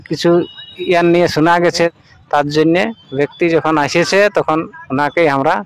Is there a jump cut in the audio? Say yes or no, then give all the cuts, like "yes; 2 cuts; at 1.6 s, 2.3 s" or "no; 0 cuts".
yes; 1 cut; at 1.9 s